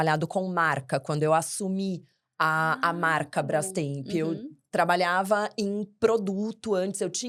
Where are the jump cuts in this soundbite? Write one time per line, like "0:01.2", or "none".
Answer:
none